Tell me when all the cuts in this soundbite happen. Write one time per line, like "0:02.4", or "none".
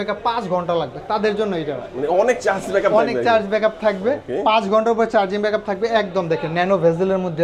none